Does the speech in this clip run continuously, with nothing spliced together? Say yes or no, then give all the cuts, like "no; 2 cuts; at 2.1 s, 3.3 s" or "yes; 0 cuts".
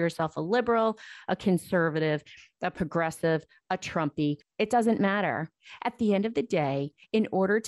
no; 1 cut; at 4.5 s